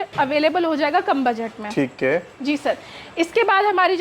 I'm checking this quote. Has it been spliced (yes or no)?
no